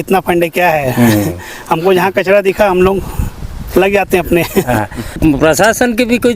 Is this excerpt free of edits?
no; 1 cut; at 5.2 s

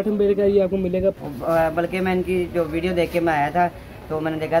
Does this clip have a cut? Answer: yes; 1 cut; at 1.2 s

